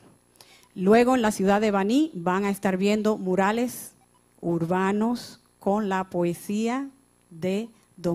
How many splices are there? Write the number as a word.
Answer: zero